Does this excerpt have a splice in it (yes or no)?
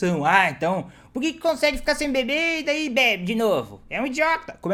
no